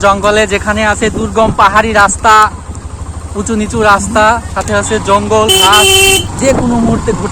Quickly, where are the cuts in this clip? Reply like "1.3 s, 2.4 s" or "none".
6.3 s

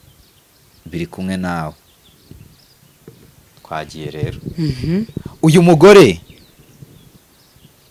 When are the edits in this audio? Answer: none

